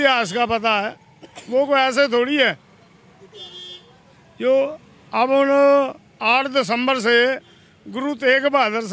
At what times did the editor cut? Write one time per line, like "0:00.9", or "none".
none